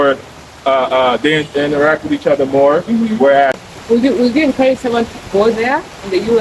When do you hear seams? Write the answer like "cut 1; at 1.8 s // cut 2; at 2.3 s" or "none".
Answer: cut 1; at 3.6 s